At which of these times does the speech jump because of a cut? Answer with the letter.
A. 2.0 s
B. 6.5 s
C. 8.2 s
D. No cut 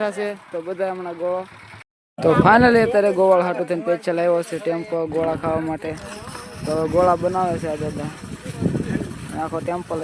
A